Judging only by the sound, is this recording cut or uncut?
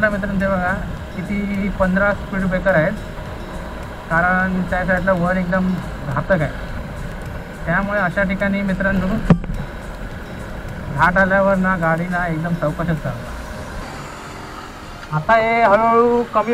cut